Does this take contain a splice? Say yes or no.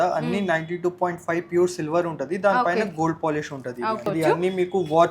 yes